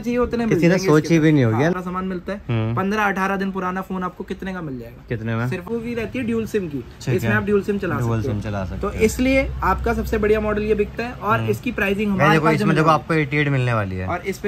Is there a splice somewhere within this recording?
yes; 2 cuts; at 1.7 s, 5.7 s

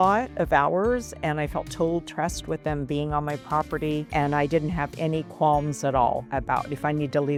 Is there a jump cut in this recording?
no; 0 cuts

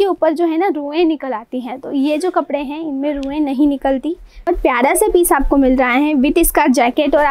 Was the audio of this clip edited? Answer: yes; 1 cut; at 4.4 s

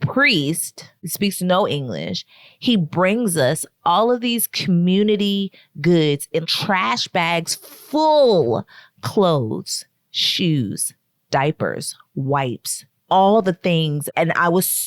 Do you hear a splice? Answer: yes; 1 cut; at 13.0 s

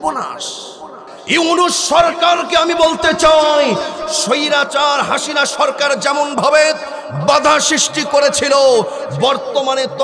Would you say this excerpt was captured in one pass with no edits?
no; 1 cut; at 1.2 s

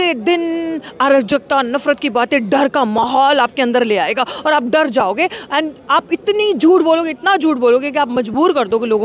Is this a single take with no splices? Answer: yes; 0 cuts

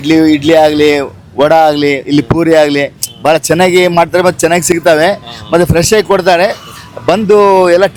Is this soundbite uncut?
yes; 0 cuts

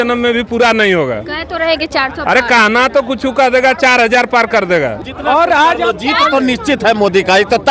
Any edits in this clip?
yes; 1 cut; at 5.1 s

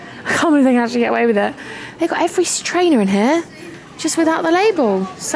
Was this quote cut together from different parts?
no; 0 cuts

